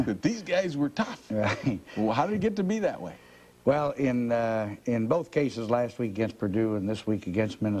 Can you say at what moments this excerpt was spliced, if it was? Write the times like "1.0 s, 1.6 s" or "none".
none